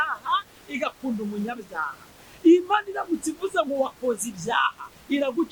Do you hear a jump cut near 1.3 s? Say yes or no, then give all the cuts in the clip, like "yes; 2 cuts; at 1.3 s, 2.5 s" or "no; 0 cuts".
no; 0 cuts